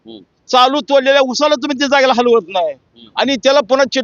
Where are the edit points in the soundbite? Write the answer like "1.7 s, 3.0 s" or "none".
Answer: none